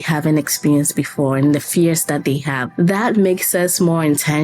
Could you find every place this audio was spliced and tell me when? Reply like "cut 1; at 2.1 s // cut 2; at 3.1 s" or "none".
cut 1; at 2.6 s